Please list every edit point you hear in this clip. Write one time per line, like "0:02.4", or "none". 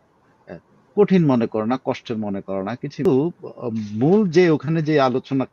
0:03.1